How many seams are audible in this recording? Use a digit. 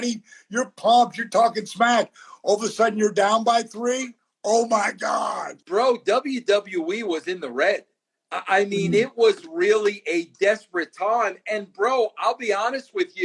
1